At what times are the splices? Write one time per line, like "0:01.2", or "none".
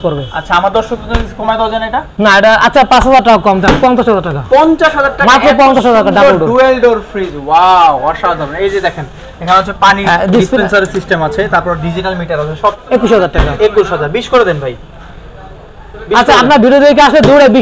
0:12.8